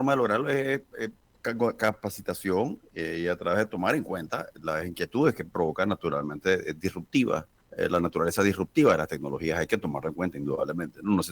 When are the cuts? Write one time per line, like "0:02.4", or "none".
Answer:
0:01.3
0:07.6